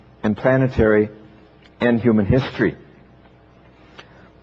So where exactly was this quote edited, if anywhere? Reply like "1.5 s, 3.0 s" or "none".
none

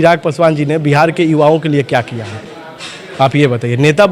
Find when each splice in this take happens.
none

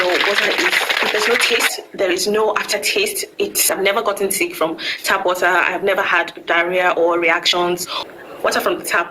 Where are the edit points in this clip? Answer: 3.7 s, 7.9 s

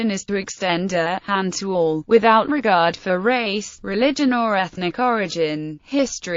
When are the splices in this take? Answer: 4.7 s

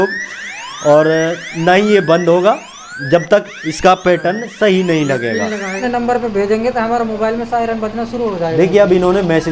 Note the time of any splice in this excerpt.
5.8 s

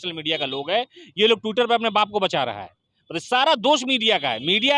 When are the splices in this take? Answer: none

